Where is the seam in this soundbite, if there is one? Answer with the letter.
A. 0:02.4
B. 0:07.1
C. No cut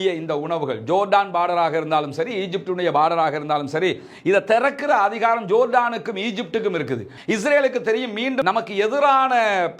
B